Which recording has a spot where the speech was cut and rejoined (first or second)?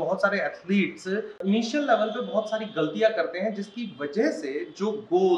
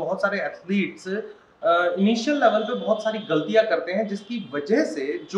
first